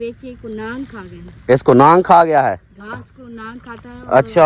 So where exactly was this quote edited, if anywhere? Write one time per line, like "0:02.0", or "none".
none